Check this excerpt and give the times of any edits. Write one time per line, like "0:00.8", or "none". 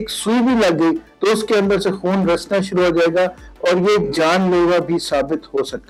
none